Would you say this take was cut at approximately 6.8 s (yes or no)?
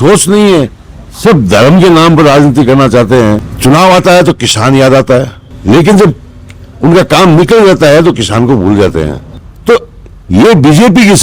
no